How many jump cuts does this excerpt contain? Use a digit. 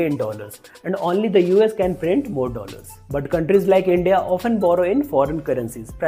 0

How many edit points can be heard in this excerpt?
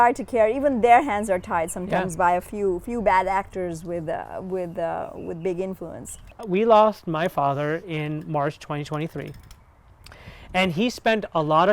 1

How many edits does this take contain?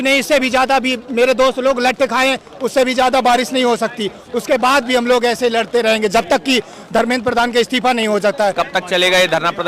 1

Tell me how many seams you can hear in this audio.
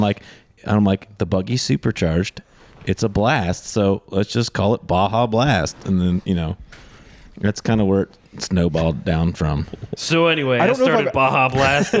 1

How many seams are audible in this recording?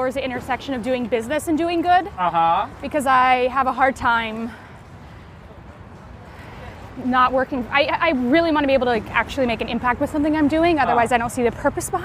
0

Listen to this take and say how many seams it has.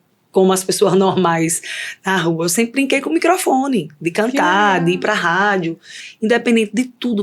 1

